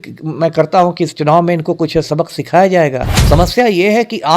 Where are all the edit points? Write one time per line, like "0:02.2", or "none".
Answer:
0:03.1